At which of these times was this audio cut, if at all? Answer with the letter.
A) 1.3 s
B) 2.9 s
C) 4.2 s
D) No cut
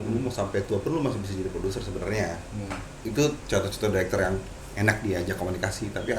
B